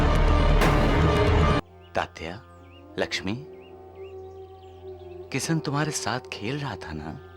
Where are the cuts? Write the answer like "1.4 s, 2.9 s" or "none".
1.6 s